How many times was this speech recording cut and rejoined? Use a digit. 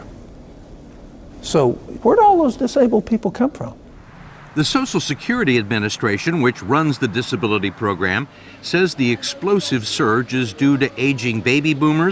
0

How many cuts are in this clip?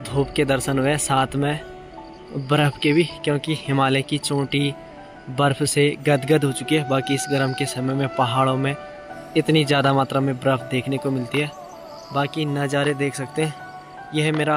0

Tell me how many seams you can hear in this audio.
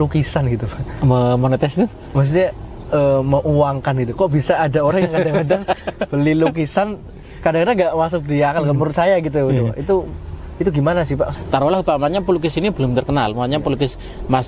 1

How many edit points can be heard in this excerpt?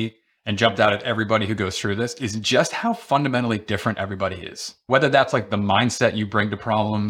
0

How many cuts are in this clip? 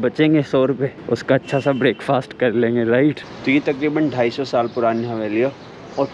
1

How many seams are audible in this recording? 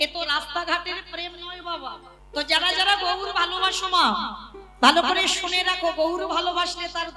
1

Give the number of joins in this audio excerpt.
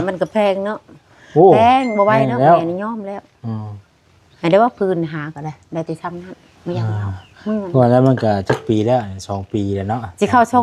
0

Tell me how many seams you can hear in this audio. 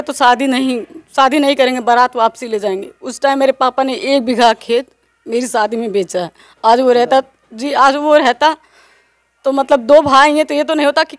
0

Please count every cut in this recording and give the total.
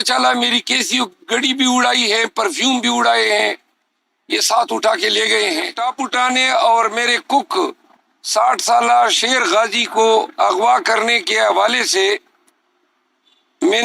1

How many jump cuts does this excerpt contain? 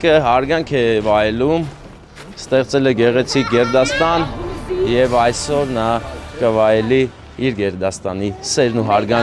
0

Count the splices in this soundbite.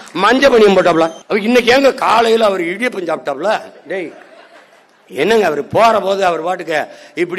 1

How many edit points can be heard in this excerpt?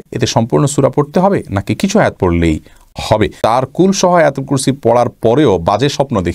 1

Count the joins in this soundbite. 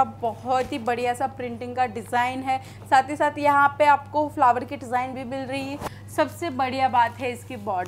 0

